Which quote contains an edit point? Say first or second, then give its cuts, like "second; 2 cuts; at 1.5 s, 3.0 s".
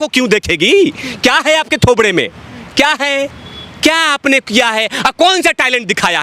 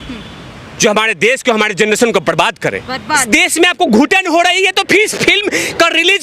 second; 1 cut; at 3.2 s